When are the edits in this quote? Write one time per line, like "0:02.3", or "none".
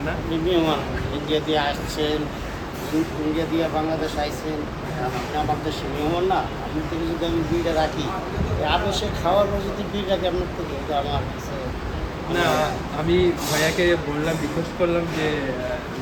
none